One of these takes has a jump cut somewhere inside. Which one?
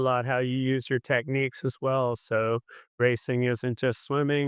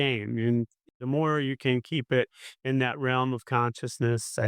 second; 1 cut; at 1.0 s

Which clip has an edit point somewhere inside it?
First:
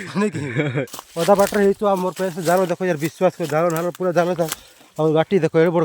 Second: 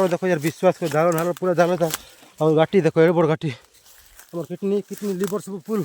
first; 1 cut; at 1.0 s

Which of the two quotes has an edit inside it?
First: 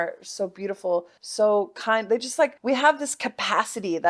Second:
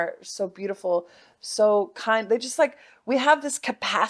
first; 2 cuts; at 1.2 s, 2.6 s

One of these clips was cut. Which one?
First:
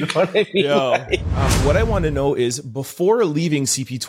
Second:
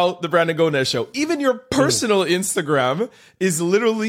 first; 1 cut; at 1.3 s

